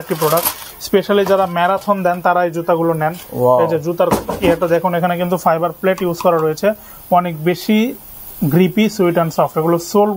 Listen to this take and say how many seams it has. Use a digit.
0